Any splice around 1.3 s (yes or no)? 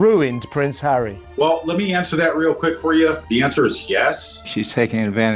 no